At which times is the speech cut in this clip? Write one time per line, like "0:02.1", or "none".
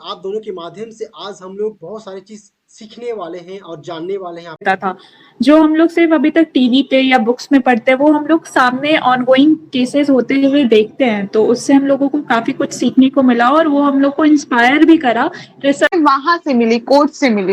0:04.6
0:15.9

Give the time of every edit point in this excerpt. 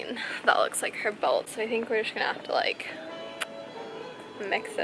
none

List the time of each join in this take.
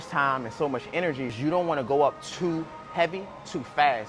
0:01.4

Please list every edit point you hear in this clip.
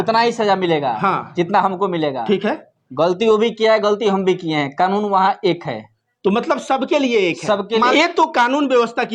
0:07.9

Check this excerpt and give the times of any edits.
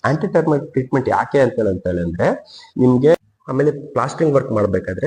0:03.2

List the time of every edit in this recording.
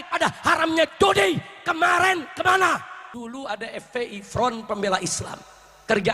0:03.0

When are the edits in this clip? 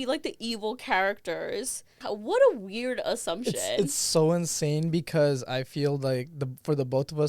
0:02.0

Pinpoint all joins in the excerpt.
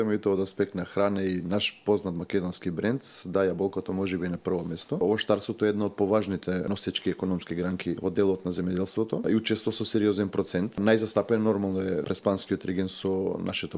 0:05.0
0:06.7
0:08.0
0:09.2
0:10.8
0:12.0

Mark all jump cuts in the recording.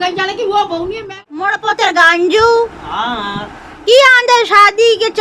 0:01.1

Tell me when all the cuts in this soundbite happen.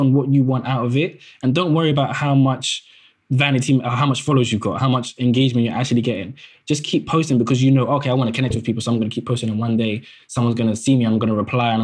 none

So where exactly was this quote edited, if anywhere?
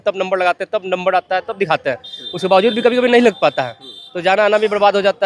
none

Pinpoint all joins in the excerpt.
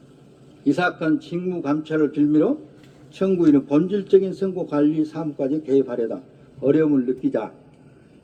none

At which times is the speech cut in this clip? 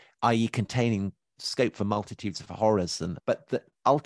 0:01.4
0:03.2

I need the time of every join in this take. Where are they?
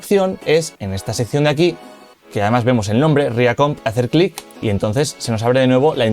0:03.8
0:04.5

